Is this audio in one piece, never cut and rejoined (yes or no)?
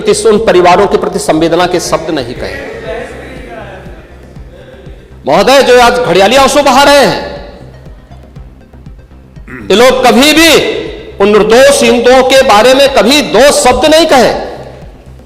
yes